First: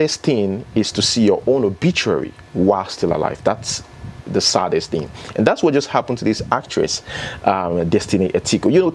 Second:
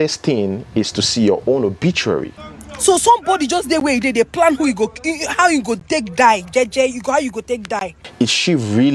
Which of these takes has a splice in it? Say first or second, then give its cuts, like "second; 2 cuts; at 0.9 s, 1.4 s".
second; 2 cuts; at 2.4 s, 8.0 s